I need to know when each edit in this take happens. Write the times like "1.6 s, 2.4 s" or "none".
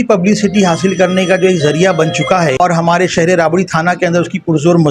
2.6 s